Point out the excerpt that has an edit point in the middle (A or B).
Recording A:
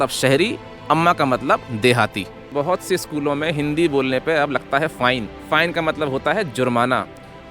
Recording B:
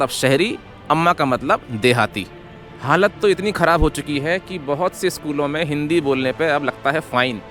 A